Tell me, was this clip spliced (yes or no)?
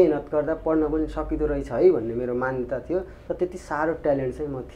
no